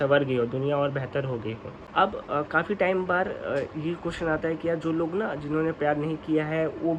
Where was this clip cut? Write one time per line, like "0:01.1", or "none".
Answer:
0:01.8